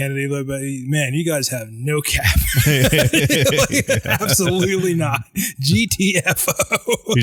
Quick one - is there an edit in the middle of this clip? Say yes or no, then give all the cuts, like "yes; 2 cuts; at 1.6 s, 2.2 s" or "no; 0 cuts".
no; 0 cuts